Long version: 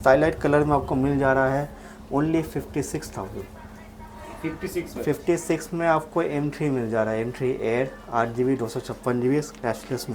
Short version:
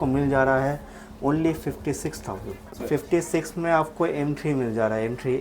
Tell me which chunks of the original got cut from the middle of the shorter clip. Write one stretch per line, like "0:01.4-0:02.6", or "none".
0:03.7-0:04.9